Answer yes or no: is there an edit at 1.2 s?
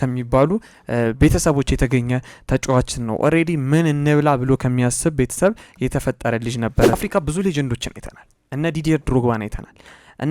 no